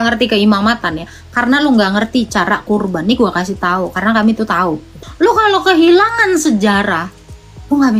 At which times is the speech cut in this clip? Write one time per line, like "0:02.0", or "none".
0:05.0